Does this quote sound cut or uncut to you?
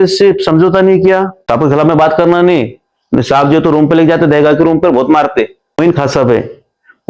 cut